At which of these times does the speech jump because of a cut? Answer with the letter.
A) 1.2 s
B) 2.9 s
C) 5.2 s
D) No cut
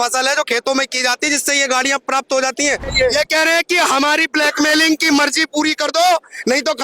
B